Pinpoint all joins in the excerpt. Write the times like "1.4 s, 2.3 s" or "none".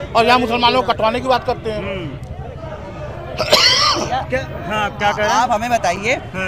none